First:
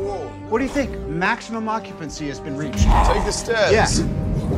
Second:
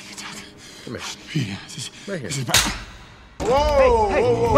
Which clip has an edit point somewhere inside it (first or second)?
second